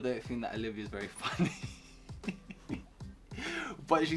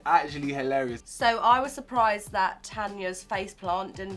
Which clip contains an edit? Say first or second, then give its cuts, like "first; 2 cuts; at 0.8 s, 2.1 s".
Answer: second; 1 cut; at 1.0 s